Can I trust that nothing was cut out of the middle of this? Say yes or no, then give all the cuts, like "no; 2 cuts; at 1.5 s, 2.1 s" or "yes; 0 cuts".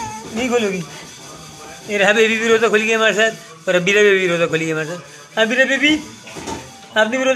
yes; 0 cuts